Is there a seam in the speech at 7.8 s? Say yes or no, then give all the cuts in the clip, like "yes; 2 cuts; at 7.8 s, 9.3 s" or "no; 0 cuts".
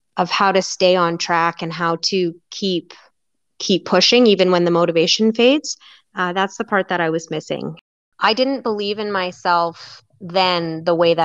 yes; 1 cut; at 7.8 s